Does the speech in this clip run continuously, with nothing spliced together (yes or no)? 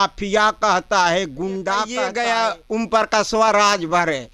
no